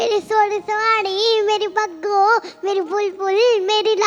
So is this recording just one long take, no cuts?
yes; 0 cuts

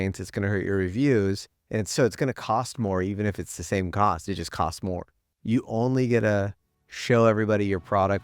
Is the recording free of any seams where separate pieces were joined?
no; 1 cut; at 5.1 s

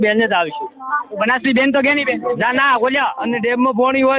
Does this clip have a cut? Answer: yes; 1 cut; at 3.3 s

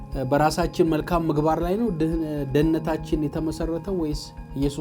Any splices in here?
no; 0 cuts

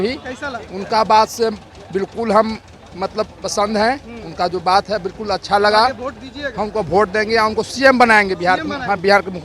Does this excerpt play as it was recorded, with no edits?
yes; 0 cuts

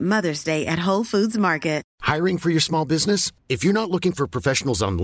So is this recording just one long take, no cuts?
no; 1 cut; at 1.9 s

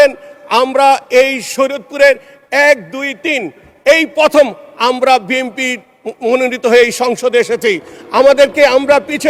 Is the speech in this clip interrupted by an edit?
no; 0 cuts

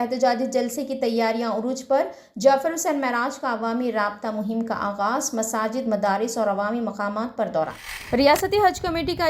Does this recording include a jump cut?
yes; 1 cut; at 7.9 s

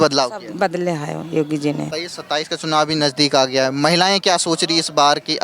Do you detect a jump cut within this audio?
yes; 1 cut; at 2.0 s

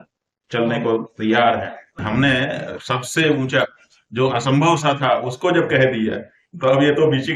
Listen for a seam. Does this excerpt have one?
yes; 1 cut; at 2.0 s

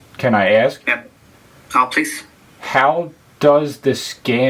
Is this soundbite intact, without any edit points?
yes; 0 cuts

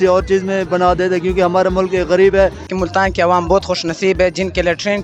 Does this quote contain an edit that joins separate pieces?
yes; 1 cut; at 2.7 s

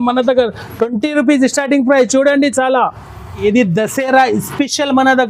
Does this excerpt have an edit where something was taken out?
yes; 1 cut; at 3.4 s

